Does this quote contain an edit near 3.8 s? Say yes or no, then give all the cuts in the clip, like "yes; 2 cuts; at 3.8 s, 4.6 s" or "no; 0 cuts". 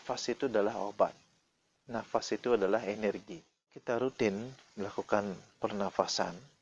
yes; 1 cut; at 3.8 s